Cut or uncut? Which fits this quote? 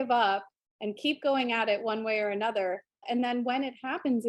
cut